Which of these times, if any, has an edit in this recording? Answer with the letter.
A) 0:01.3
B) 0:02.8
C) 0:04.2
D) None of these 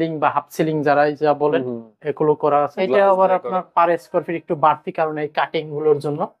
B